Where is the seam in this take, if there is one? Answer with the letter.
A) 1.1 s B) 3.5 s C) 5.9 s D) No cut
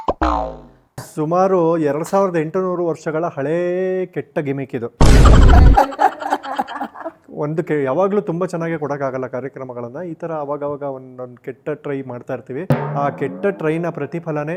A